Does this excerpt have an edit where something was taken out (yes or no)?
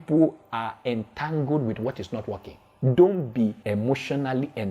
yes